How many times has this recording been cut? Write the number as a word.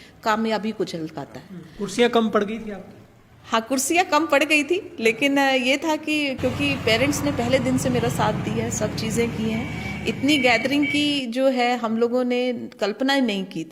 zero